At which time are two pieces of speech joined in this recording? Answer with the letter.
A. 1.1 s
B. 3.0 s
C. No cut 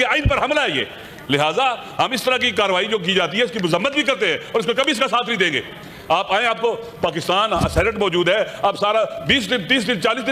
C